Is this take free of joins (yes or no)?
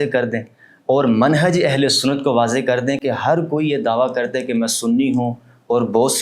yes